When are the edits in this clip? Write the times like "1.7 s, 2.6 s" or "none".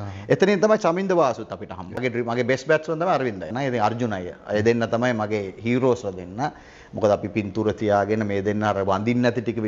1.9 s, 3.5 s